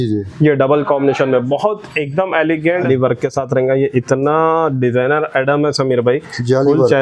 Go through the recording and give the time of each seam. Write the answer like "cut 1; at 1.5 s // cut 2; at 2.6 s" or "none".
cut 1; at 2.8 s